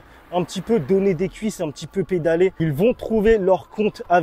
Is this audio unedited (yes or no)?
no